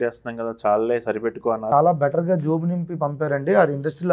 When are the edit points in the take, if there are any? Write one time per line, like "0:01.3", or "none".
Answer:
0:01.6